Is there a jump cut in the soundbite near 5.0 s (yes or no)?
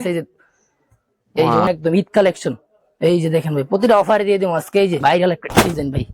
yes